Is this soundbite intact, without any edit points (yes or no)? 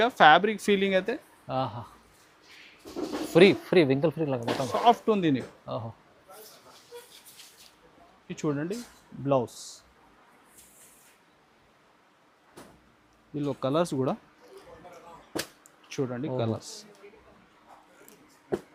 yes